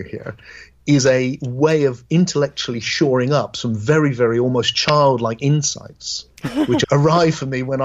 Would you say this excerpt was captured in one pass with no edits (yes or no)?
no